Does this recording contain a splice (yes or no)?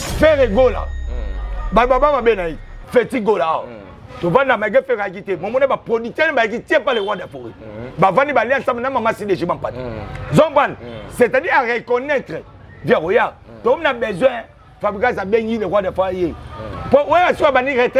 no